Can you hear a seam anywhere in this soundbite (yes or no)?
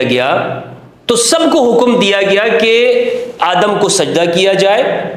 no